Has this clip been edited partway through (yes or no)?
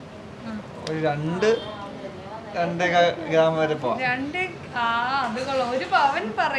no